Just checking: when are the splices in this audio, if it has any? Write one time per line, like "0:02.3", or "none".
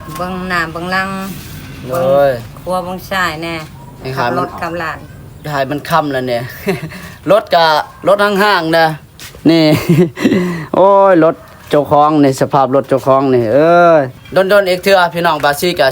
0:14.1